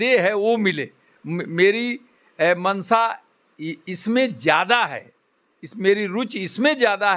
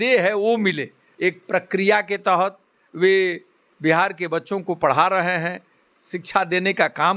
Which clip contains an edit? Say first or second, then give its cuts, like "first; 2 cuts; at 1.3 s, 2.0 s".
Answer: second; 1 cut; at 1.0 s